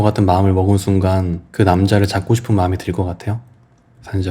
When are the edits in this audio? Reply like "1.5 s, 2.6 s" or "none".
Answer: 1.4 s